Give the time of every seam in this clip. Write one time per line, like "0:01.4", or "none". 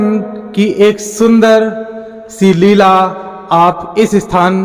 none